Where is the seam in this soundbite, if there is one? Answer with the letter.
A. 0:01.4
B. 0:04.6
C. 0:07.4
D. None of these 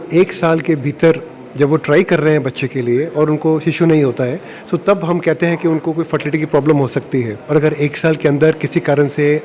C